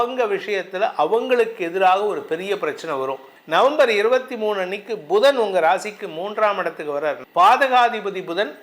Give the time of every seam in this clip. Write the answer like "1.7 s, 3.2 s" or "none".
3.3 s, 7.2 s